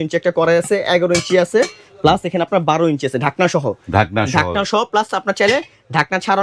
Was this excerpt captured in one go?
yes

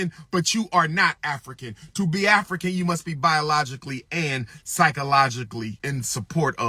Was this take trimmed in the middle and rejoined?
yes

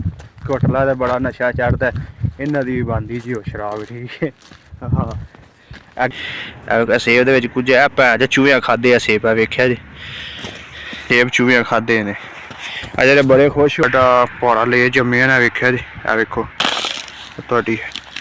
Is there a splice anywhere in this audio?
yes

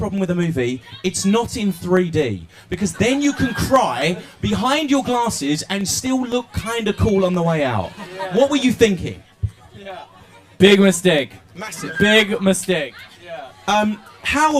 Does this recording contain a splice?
yes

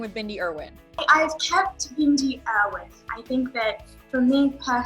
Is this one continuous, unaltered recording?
no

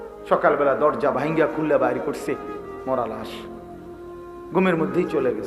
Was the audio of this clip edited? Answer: yes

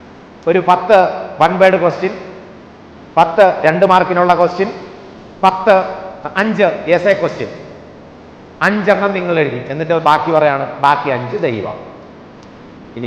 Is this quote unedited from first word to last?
yes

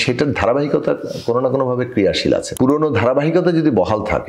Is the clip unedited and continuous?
no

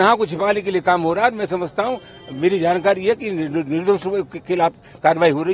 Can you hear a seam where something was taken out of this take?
no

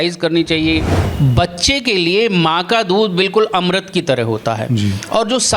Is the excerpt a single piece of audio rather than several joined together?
no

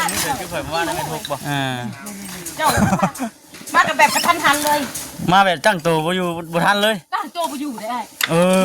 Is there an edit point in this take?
yes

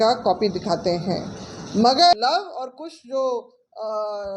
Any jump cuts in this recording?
yes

